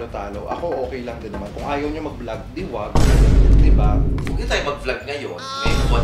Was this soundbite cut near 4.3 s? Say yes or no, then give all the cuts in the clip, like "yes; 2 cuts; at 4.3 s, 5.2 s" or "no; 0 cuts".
yes; 1 cut; at 4.3 s